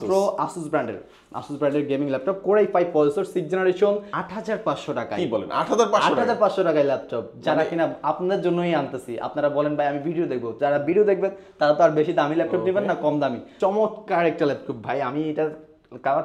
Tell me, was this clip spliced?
yes; 2 cuts; at 4.1 s, 13.5 s

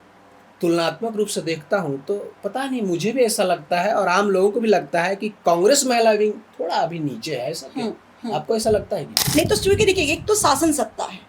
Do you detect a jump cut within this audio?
yes; 1 cut; at 9.2 s

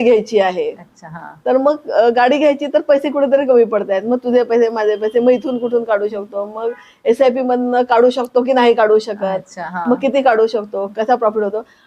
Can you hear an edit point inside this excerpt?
no; 0 cuts

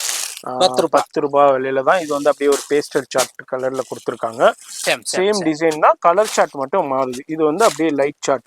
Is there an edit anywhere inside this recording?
yes; 1 cut; at 4.9 s

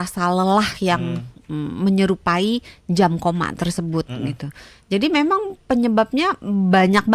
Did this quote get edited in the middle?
no; 0 cuts

